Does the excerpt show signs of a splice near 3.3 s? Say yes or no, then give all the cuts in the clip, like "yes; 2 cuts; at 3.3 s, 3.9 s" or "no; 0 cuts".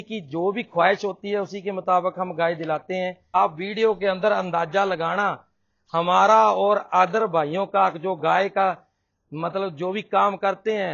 yes; 1 cut; at 3.3 s